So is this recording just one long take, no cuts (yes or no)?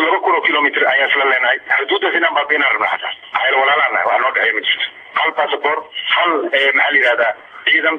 yes